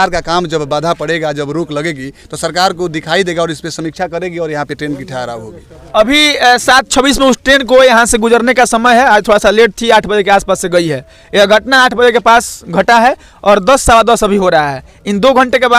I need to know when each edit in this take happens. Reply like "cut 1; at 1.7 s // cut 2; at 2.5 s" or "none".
none